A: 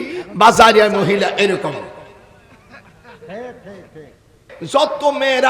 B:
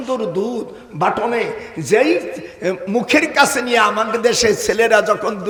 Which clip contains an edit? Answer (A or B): A